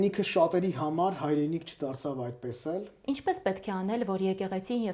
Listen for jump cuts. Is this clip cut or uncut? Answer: cut